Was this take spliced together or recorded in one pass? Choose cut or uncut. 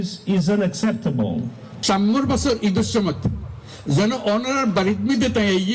cut